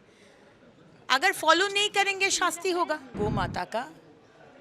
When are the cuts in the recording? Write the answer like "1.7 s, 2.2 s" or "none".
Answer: 3.1 s